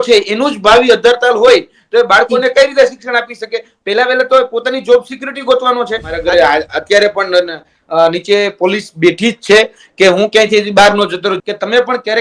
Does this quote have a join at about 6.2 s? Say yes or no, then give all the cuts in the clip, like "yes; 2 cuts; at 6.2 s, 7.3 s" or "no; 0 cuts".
yes; 2 cuts; at 6.2 s, 11.4 s